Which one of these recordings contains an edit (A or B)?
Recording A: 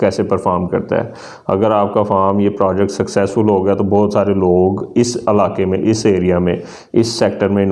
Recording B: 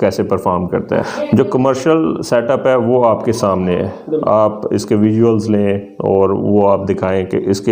B